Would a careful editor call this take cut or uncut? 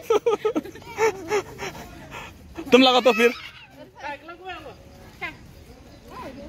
uncut